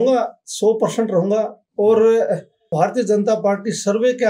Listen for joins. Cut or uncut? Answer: cut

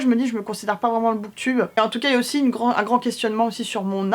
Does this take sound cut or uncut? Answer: cut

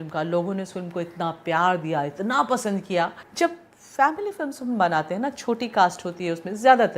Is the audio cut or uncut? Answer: cut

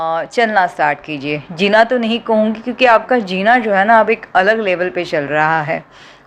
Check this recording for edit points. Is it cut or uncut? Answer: uncut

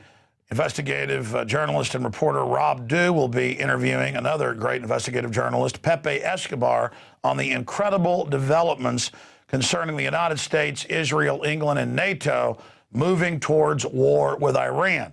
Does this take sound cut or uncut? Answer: cut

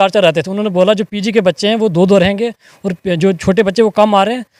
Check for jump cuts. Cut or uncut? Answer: uncut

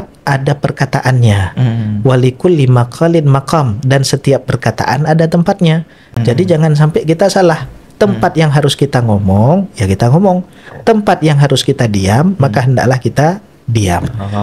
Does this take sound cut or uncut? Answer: uncut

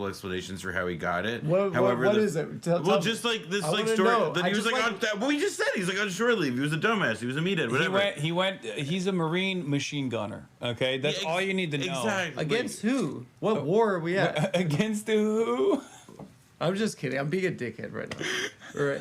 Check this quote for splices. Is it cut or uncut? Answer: cut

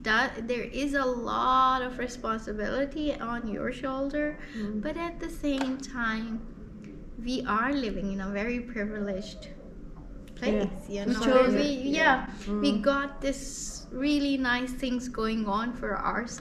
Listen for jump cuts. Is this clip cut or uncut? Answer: uncut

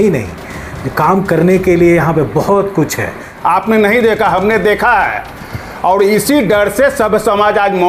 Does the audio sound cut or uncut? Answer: cut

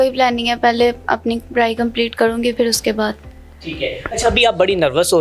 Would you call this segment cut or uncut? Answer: uncut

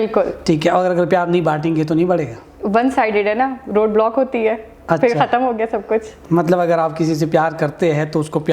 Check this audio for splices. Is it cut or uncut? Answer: uncut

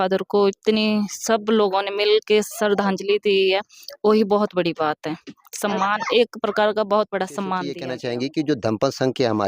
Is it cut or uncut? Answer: cut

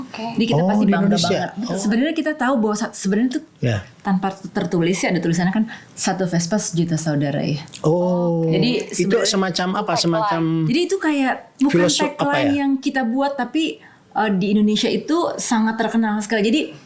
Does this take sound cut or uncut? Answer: cut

